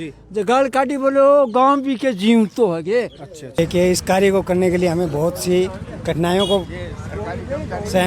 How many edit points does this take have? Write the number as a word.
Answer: one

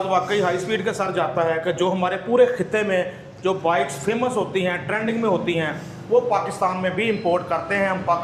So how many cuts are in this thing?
zero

